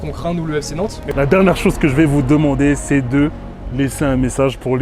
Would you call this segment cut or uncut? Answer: cut